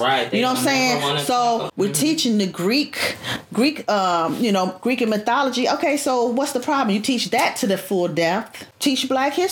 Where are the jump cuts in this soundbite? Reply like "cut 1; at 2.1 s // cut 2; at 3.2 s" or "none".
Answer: cut 1; at 1.7 s // cut 2; at 8.6 s